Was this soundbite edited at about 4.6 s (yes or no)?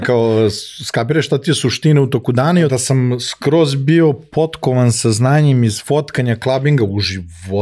no